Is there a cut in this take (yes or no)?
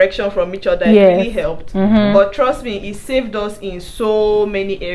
no